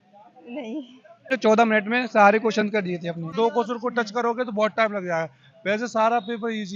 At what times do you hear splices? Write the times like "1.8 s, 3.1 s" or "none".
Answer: 1.3 s, 3.3 s